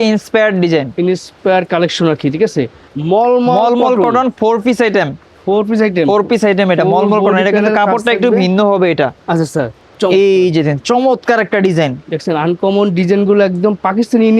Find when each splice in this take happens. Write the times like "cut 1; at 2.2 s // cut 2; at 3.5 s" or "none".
cut 1; at 2.8 s // cut 2; at 9.8 s